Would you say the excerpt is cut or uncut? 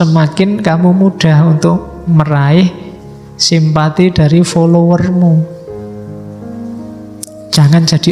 uncut